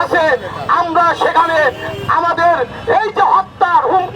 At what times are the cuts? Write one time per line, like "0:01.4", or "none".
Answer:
none